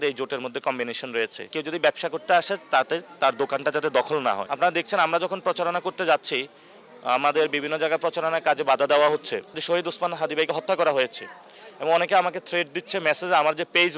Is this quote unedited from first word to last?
no; 3 cuts; at 1.4 s, 4.5 s, 9.6 s

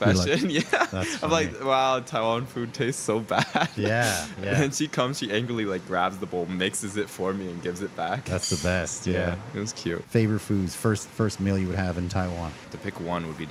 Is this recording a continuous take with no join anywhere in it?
yes; 0 cuts

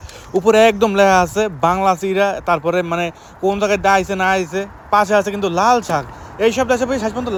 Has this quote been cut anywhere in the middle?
no; 0 cuts

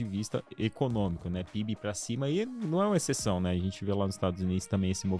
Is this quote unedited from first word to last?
yes; 0 cuts

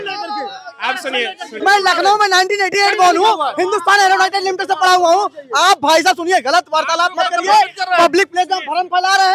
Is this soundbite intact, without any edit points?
no; 1 cut; at 1.5 s

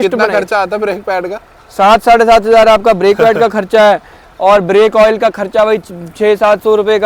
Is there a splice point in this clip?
no; 0 cuts

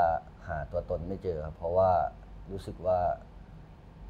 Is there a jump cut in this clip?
no; 0 cuts

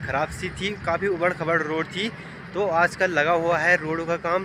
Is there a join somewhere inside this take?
no; 0 cuts

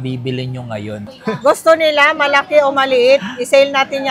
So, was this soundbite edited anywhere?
yes; 1 cut; at 1.1 s

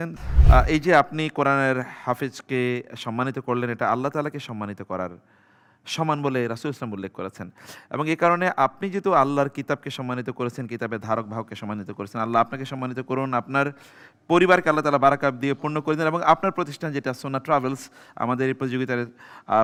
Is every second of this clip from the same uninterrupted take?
yes; 0 cuts

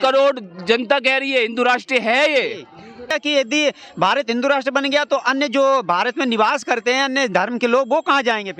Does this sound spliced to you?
yes; 1 cut; at 3.0 s

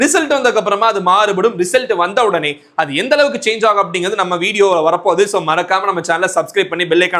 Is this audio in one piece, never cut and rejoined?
yes; 0 cuts

